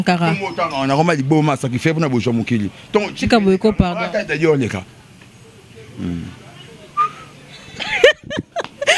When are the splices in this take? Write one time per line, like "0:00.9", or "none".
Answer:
none